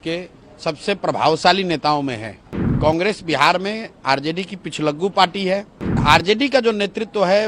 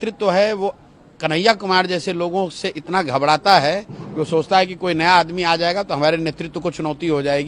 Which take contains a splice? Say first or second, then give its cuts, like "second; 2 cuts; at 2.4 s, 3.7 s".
first; 2 cuts; at 2.7 s, 6.0 s